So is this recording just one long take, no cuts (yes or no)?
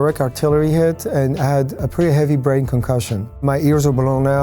no